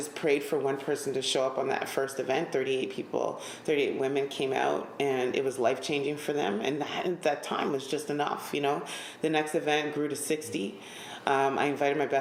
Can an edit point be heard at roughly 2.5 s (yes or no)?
no